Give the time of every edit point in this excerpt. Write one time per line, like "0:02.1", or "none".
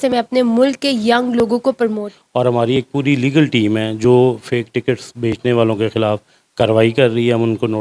0:02.1

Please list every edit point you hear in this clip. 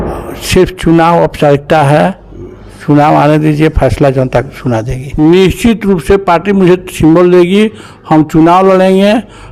0:05.0

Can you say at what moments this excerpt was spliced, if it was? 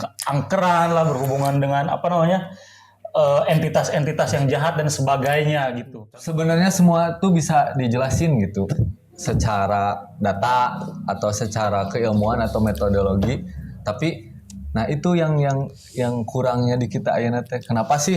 0:05.9

